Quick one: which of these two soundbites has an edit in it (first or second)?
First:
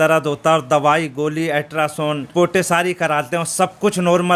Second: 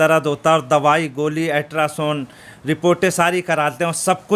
first